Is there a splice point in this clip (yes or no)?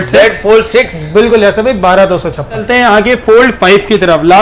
yes